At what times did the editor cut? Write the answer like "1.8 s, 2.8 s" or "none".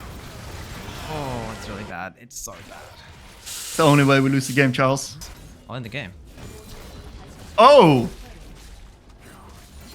5.2 s

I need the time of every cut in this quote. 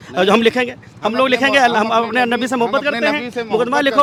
none

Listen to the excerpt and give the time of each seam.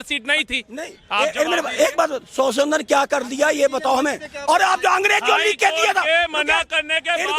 none

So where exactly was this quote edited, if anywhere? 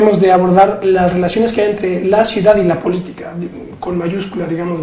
2.1 s

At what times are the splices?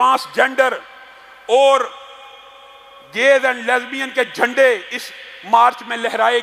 none

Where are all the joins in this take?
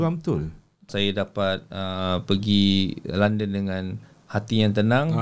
0.9 s

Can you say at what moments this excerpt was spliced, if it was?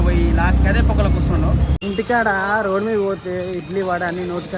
1.8 s

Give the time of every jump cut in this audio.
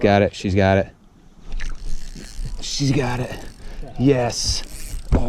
none

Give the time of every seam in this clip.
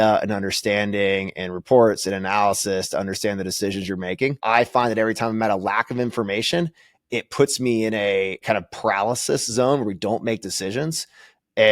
4.4 s

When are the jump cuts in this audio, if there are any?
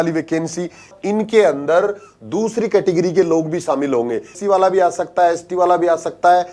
1.0 s, 4.3 s

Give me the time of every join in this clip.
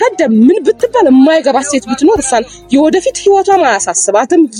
none

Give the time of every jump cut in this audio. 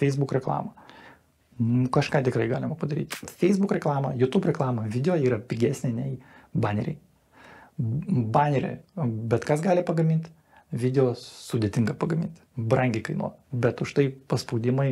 3.2 s

